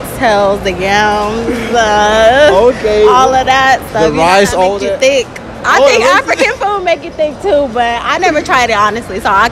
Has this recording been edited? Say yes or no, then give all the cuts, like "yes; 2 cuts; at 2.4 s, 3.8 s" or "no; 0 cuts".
no; 0 cuts